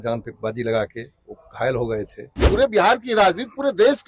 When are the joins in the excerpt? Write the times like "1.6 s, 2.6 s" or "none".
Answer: 2.4 s